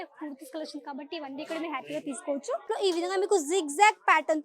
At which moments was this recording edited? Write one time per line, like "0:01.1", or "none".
0:02.7